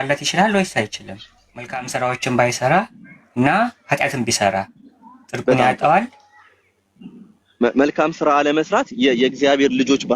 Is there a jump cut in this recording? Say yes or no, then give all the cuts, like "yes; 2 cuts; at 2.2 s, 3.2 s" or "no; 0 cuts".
yes; 1 cut; at 1.8 s